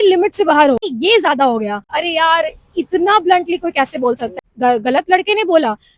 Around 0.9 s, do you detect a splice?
yes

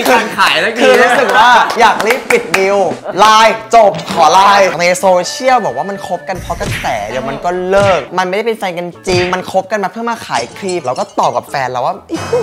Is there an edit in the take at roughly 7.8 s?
no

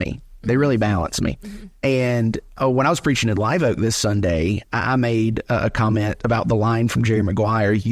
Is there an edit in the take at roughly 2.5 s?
yes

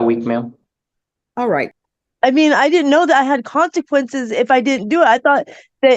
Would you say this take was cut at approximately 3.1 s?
no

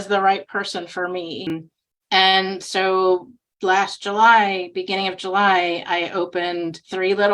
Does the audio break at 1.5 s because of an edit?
yes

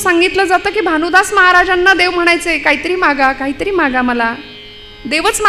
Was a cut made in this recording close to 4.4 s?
no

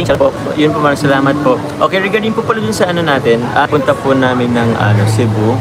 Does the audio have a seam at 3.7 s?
yes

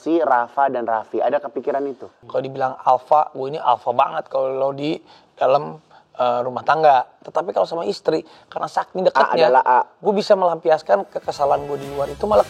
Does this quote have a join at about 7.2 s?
yes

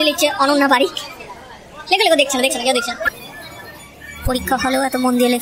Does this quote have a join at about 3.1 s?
yes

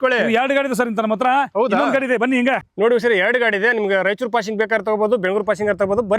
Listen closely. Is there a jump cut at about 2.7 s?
yes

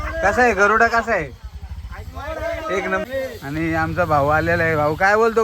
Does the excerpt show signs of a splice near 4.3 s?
no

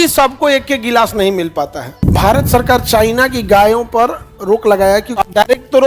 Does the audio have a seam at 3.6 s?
no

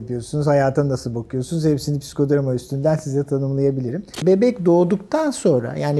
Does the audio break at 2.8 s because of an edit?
no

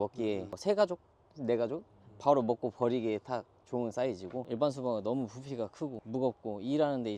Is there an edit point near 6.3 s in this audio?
no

